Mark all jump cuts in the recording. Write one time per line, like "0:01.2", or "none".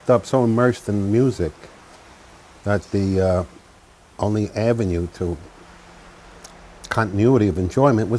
0:02.3

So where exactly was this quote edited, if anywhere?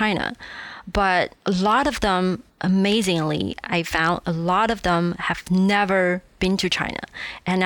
none

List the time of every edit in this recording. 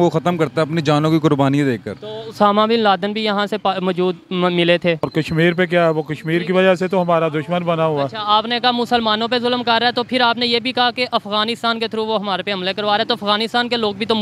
0:05.1

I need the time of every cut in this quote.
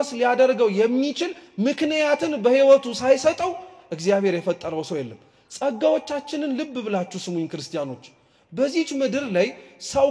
none

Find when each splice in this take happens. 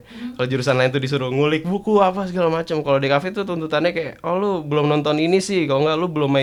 none

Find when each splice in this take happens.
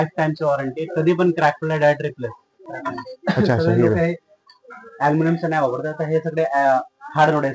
0:02.7

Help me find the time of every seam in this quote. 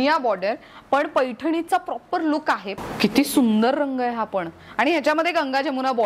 0:02.7

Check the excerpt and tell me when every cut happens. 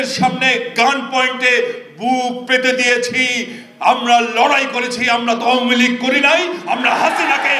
none

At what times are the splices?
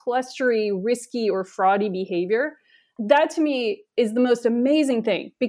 0:02.9

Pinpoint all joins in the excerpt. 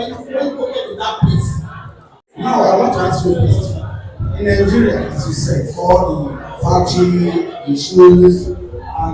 0:01.8

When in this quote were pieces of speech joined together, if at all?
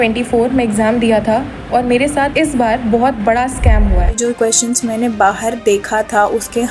0:04.2

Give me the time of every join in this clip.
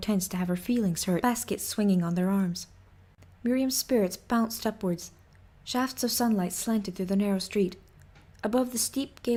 none

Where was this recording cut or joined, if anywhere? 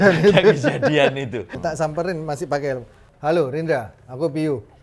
0:01.5

